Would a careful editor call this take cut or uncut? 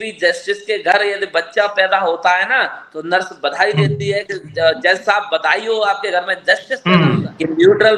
cut